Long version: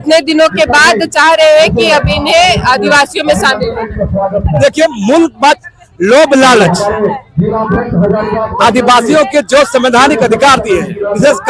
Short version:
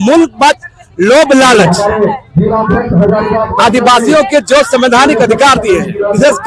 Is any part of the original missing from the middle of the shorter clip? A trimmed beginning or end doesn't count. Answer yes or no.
no